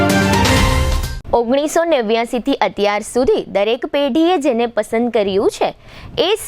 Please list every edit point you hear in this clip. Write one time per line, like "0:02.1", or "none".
none